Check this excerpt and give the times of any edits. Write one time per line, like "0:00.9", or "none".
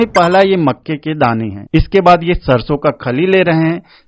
0:01.6